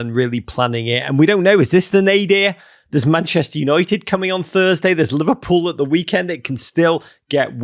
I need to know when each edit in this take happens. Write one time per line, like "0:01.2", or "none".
none